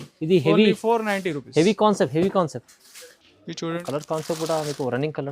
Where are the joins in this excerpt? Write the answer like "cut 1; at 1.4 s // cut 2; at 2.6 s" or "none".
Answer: cut 1; at 3.8 s